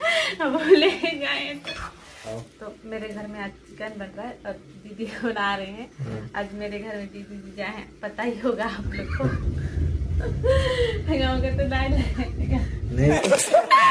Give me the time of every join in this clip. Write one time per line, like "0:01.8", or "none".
none